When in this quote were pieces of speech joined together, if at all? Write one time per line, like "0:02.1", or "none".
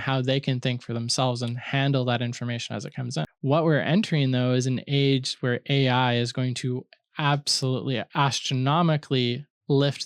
0:03.3